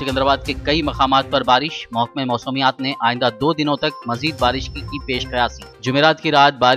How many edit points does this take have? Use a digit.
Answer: 0